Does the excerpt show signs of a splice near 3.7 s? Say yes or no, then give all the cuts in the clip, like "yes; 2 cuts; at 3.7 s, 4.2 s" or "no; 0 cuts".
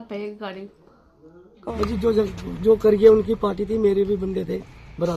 no; 1 cut; at 1.7 s